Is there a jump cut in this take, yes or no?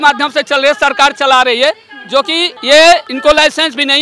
yes